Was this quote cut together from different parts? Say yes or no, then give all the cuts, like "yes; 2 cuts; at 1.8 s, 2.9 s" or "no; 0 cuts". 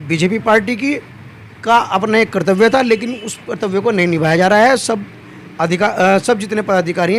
no; 0 cuts